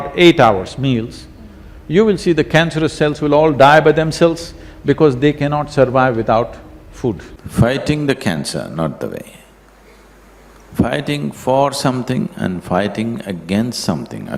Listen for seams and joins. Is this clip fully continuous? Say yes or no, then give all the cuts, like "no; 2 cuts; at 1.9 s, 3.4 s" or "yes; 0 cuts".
no; 1 cut; at 7.3 s